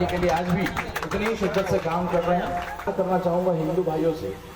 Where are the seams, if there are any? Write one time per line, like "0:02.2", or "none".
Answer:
0:02.9